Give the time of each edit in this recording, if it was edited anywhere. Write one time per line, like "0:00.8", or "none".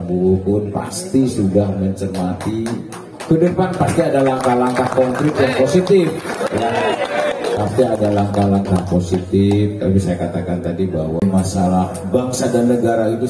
0:11.2